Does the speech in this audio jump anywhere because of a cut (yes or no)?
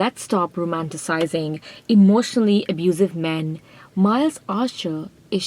no